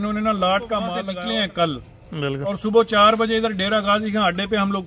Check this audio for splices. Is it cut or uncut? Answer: cut